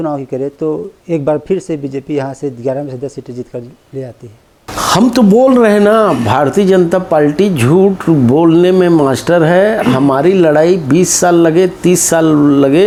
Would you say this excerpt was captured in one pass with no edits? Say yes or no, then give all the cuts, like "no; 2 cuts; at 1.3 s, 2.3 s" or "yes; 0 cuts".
yes; 0 cuts